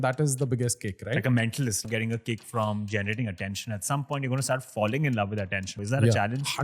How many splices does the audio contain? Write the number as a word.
two